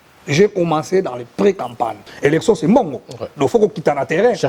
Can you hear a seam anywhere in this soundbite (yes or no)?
yes